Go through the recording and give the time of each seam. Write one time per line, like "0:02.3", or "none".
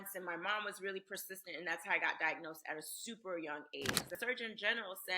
0:04.2